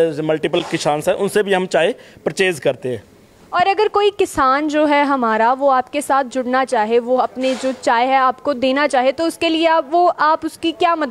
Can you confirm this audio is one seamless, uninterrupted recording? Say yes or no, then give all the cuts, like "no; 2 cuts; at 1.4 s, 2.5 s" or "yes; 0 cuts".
yes; 0 cuts